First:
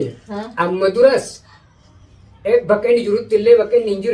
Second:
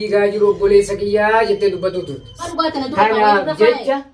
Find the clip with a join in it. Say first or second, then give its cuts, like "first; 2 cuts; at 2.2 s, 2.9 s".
second; 1 cut; at 2.5 s